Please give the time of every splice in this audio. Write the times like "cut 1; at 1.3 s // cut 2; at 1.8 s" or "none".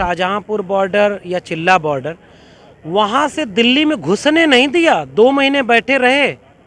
none